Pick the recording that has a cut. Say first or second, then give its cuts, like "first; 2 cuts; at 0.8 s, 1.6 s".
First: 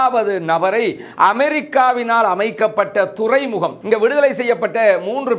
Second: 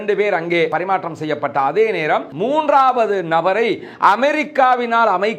first; 1 cut; at 3.8 s